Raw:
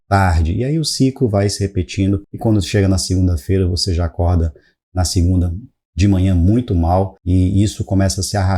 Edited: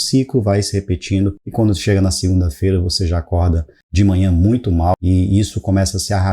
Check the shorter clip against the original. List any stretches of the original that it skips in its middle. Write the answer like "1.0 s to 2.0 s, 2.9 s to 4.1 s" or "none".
4.6 s to 5.8 s, 7.0 s to 7.2 s